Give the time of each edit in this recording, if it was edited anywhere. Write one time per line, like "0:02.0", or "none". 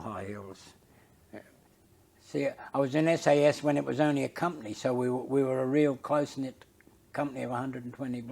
0:01.7